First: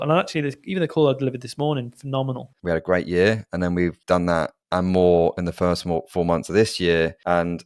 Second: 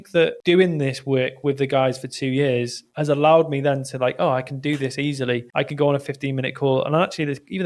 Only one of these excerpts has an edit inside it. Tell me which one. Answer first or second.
first